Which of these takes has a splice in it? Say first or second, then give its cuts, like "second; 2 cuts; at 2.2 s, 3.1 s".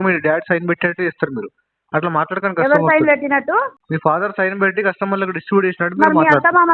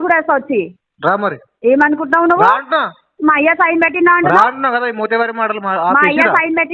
first; 1 cut; at 3.8 s